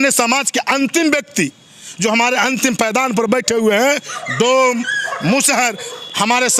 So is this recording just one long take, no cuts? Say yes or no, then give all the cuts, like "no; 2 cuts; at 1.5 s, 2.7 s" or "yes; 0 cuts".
yes; 0 cuts